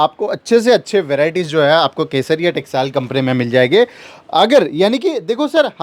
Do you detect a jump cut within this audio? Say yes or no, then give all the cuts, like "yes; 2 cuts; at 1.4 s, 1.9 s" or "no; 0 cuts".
no; 0 cuts